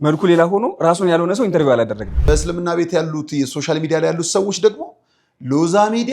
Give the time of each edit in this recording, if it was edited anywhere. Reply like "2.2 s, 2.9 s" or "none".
2.1 s